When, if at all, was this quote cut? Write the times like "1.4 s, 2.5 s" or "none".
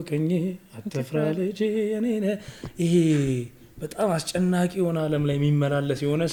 none